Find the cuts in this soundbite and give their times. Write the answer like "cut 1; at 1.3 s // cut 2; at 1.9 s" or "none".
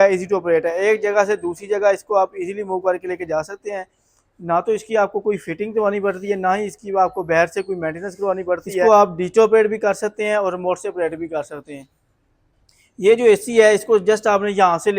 cut 1; at 8.8 s